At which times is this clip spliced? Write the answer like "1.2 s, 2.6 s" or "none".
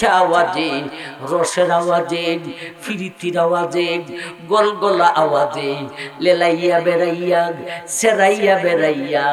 none